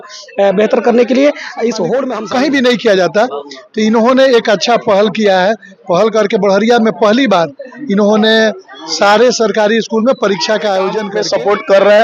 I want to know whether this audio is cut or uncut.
cut